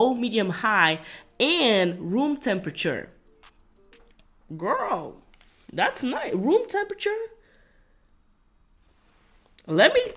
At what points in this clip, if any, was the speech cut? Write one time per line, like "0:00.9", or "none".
none